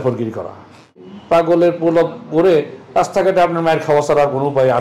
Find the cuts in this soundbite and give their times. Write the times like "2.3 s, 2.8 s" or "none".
1.3 s